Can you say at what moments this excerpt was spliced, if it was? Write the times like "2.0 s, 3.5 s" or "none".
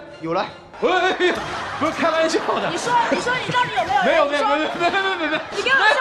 none